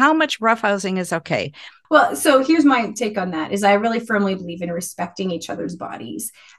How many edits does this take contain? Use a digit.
1